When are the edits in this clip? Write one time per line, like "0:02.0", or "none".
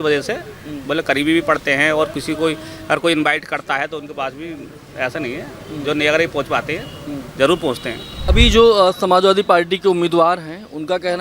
0:08.1